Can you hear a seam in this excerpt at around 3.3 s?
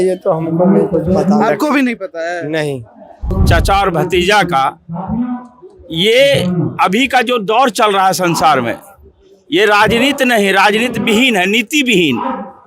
yes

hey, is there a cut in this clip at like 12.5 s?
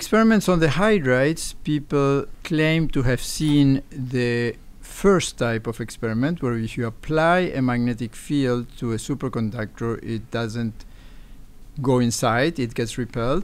no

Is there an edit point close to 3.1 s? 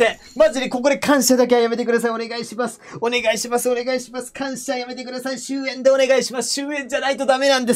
no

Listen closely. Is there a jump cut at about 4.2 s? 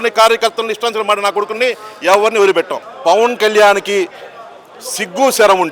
no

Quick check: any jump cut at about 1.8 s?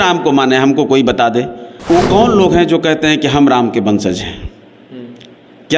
yes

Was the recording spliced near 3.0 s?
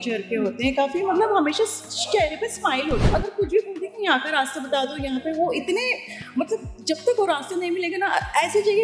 yes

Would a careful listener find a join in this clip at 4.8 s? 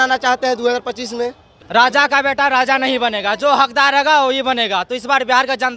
no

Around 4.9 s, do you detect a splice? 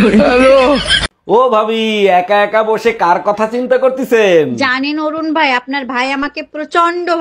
no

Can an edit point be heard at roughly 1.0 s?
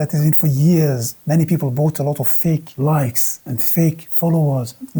no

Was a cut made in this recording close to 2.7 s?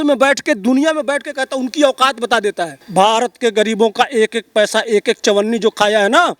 yes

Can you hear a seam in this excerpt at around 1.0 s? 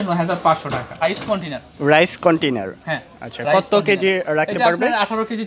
yes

